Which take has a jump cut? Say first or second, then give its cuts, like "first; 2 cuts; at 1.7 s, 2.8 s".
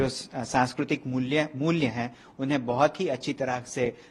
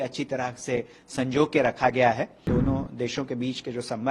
second; 1 cut; at 2.4 s